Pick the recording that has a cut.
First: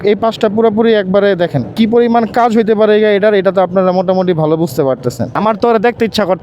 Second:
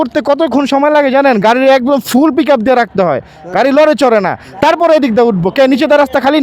first; 2 cuts; at 1.7 s, 5.3 s

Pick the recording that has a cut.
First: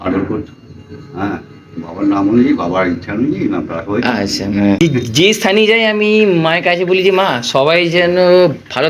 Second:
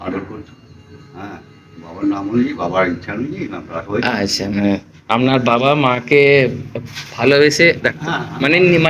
first; 1 cut; at 4.8 s

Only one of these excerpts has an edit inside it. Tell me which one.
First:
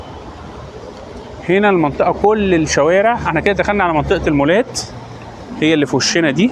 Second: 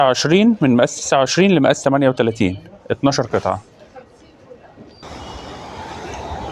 second; 1 cut; at 5.0 s

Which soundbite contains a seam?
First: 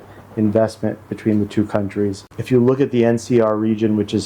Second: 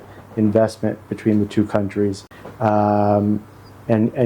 first; 1 cut; at 2.3 s

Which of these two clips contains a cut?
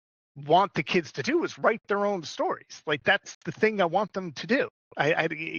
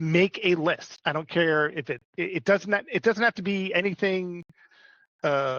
second; 1 cut; at 0.9 s

